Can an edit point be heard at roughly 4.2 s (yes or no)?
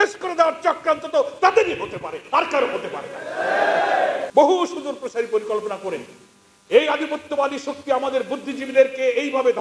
yes